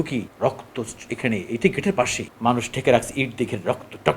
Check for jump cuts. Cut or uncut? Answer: cut